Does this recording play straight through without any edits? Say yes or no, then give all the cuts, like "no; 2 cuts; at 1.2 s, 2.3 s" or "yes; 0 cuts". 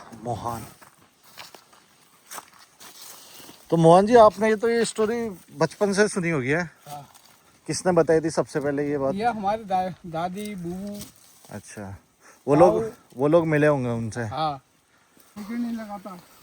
no; 2 cuts; at 2.8 s, 15.3 s